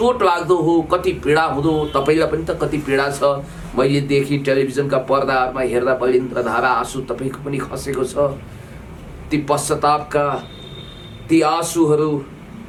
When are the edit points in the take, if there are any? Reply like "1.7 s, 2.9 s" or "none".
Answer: none